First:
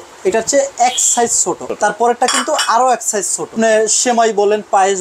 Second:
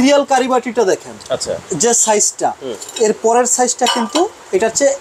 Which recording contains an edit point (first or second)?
first